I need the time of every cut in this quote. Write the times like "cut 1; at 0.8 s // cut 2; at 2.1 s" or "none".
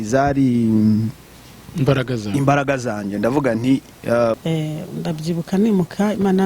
cut 1; at 4.4 s